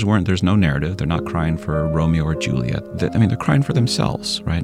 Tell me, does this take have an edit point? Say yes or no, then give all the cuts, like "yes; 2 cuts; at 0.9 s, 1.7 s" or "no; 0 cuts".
yes; 1 cut; at 2.9 s